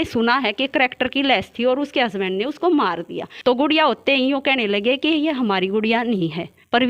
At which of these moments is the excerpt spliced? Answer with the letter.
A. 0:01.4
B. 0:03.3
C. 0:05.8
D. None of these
B